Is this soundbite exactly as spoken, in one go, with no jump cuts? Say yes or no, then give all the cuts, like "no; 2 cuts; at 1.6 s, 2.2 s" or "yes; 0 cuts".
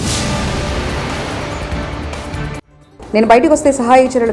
yes; 0 cuts